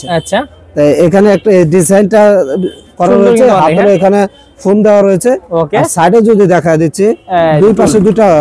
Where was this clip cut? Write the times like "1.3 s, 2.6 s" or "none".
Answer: none

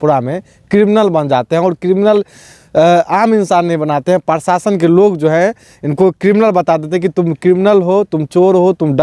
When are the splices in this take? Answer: none

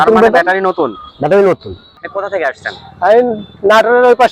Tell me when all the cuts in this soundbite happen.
2.1 s

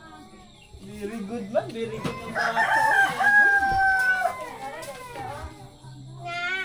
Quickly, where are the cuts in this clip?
none

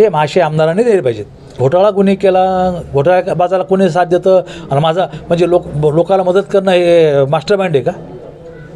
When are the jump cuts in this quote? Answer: 1.6 s

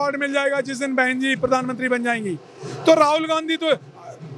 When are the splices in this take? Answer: none

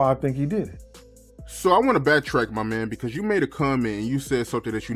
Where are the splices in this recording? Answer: none

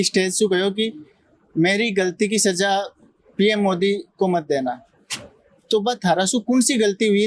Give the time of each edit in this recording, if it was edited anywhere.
none

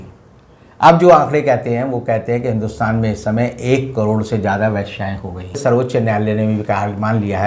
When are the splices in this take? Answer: 5.6 s

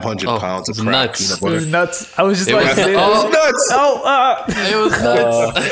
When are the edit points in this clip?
none

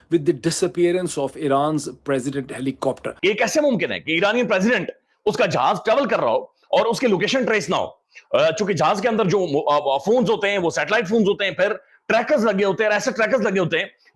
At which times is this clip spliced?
3.1 s

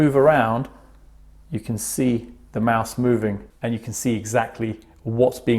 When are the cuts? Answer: 3.5 s

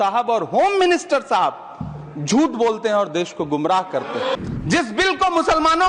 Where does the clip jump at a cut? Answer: 4.3 s

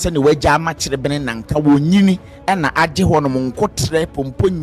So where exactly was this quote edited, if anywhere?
none

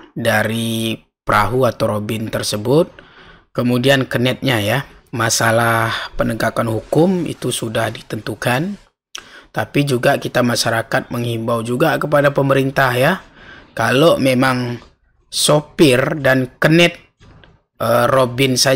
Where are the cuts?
5.0 s

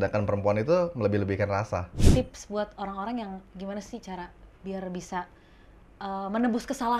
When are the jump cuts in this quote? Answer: 2.0 s

